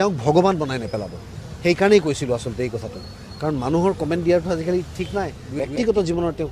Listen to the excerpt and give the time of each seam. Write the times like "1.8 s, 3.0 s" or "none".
5.6 s